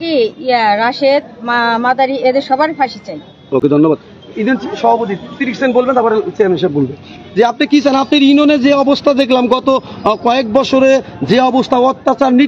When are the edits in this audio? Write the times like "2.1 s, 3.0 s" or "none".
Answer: none